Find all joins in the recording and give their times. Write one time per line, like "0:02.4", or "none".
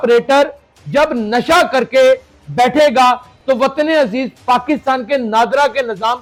none